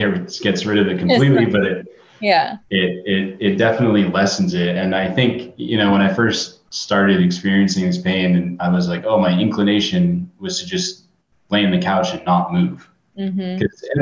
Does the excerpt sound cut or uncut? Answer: uncut